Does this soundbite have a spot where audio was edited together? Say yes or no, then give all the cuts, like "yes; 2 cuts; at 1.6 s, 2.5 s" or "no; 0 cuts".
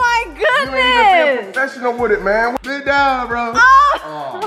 yes; 1 cut; at 2.5 s